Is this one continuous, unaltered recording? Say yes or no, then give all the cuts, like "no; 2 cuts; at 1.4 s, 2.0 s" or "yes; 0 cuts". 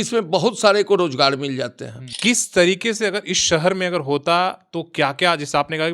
no; 1 cut; at 2.0 s